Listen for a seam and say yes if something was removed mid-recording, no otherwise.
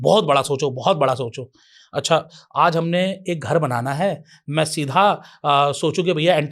no